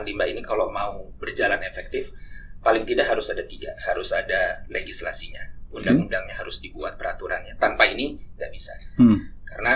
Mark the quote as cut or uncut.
uncut